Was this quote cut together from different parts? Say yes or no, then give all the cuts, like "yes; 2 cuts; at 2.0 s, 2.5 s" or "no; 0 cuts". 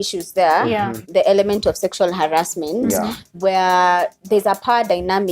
yes; 1 cut; at 1.1 s